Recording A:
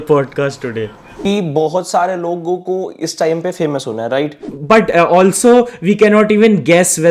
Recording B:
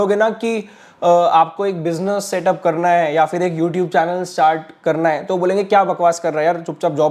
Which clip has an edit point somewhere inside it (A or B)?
A